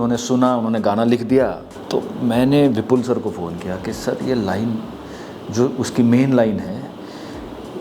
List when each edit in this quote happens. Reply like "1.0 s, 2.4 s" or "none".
1.7 s